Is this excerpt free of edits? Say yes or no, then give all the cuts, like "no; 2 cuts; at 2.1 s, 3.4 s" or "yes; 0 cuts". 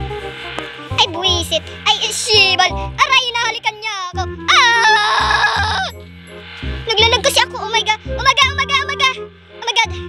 yes; 0 cuts